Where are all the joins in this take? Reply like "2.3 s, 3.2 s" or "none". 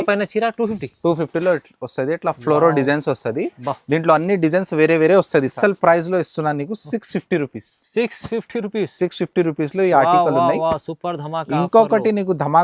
5.5 s